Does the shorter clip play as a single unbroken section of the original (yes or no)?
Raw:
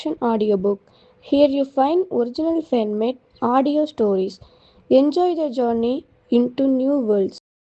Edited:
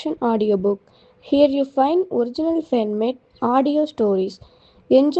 yes